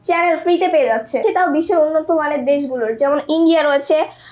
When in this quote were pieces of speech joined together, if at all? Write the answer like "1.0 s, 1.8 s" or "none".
1.2 s